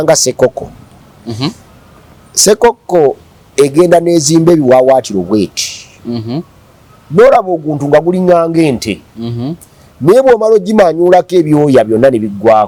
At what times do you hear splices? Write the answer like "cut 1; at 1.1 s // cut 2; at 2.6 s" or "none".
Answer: none